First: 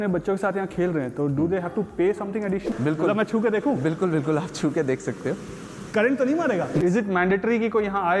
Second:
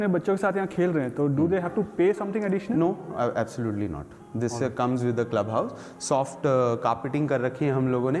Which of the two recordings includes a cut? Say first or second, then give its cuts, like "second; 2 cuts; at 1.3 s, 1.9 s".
first; 2 cuts; at 2.7 s, 6.8 s